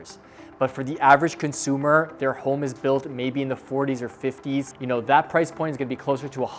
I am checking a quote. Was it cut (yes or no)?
yes